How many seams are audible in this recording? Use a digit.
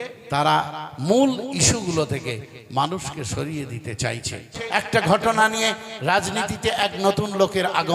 1